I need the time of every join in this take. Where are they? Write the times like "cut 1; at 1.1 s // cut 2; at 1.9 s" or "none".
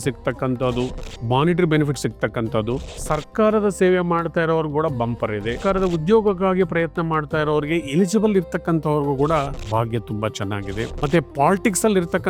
cut 1; at 1.1 s // cut 2; at 2.9 s // cut 3; at 5.6 s // cut 4; at 9.6 s // cut 5; at 10.9 s